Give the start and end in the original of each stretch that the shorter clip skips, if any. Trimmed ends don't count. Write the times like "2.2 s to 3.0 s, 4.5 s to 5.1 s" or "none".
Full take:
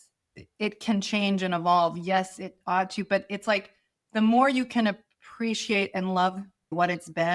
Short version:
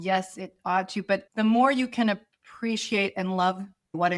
3.3 s to 4.0 s